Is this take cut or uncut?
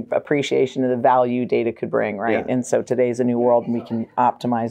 uncut